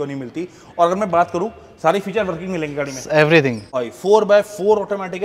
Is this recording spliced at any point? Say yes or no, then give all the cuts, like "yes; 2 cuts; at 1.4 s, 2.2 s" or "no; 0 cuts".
yes; 1 cut; at 3.8 s